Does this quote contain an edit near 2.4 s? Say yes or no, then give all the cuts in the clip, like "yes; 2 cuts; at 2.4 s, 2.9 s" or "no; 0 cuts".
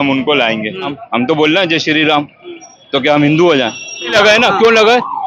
no; 2 cuts; at 1.0 s, 4.1 s